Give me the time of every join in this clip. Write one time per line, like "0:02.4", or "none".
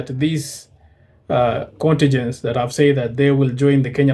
none